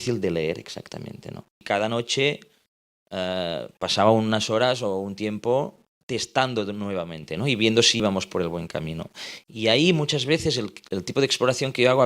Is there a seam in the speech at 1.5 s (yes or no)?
yes